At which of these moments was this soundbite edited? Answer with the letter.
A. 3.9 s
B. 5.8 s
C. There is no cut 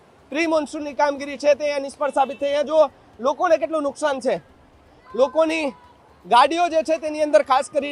C